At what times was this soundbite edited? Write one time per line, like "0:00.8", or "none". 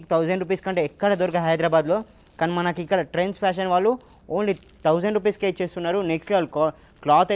none